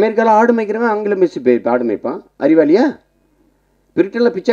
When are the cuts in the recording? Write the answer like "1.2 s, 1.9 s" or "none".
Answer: none